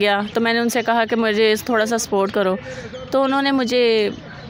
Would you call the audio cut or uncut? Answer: uncut